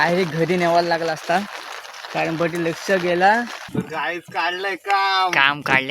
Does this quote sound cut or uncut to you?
cut